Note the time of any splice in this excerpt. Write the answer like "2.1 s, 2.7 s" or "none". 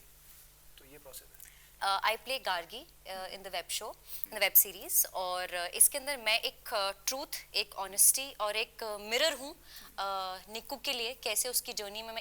1.7 s